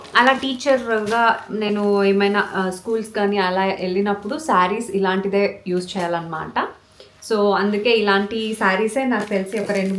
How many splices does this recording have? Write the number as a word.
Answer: zero